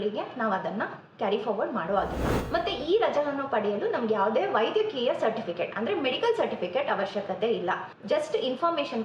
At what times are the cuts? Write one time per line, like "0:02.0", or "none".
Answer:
0:02.3
0:07.9